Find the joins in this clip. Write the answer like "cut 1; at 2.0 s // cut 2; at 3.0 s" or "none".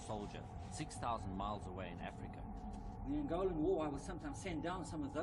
none